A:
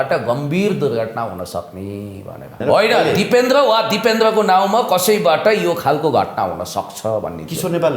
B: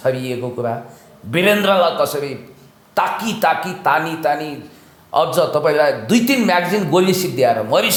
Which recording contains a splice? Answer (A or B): A